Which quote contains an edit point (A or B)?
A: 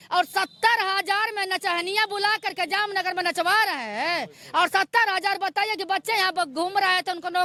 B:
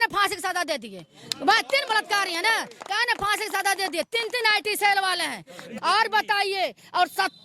B